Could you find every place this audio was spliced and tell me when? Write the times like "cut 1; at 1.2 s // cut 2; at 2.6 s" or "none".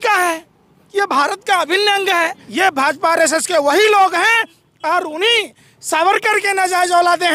cut 1; at 2.4 s